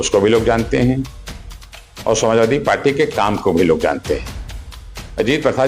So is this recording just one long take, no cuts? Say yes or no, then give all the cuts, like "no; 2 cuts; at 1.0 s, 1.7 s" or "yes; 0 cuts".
yes; 0 cuts